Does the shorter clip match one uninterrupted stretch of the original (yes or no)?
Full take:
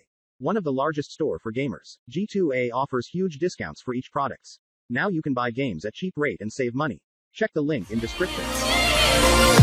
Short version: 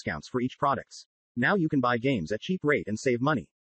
yes